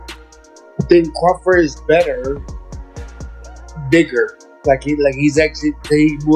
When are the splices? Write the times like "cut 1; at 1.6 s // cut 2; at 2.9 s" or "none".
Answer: cut 1; at 2.4 s // cut 2; at 3.7 s